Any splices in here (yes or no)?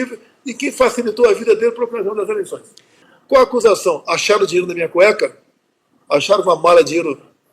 yes